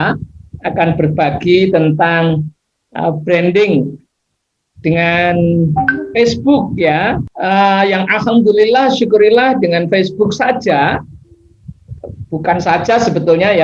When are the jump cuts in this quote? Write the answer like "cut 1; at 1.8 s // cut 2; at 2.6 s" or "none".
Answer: cut 1; at 7.3 s

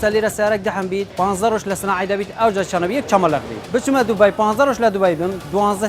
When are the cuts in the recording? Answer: cut 1; at 1.1 s // cut 2; at 3.6 s

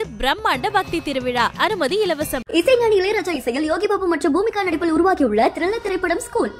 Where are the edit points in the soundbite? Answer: none

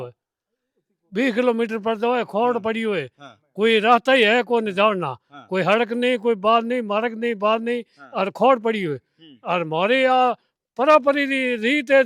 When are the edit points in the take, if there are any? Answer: none

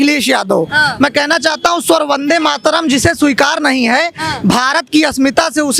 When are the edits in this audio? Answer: none

